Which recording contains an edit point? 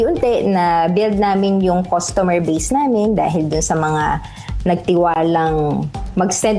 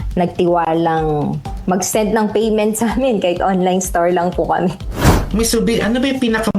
second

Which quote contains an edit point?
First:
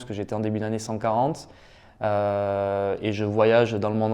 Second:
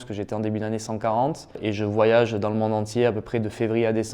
second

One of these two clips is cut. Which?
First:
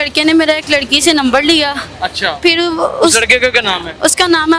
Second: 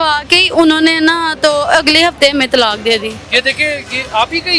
second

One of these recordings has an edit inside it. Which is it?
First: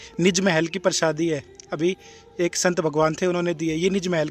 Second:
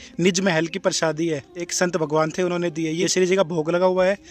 second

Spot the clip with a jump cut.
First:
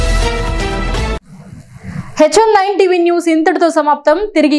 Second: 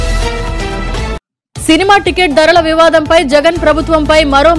second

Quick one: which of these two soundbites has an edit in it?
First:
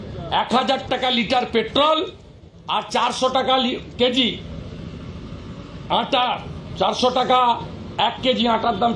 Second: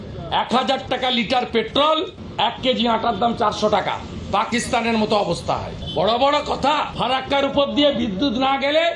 second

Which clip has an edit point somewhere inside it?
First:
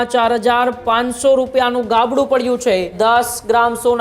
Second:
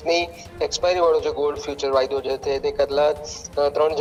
first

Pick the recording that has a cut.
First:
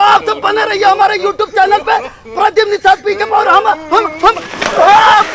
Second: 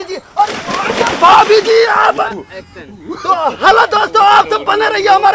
second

